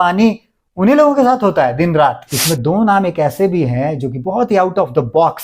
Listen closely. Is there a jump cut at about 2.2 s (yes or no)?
yes